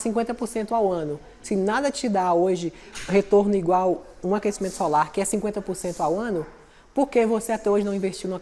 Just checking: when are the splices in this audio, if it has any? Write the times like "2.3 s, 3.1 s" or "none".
none